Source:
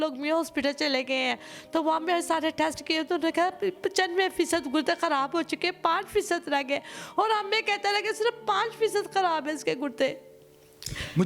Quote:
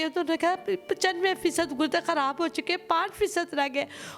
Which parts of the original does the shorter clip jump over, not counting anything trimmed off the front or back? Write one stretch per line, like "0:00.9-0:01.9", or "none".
none